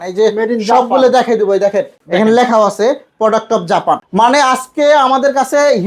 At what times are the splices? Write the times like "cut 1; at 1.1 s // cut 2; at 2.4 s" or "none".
cut 1; at 2.0 s // cut 2; at 4.1 s